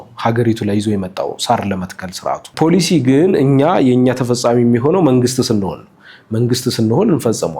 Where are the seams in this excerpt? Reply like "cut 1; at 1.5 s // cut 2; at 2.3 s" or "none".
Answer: cut 1; at 2.5 s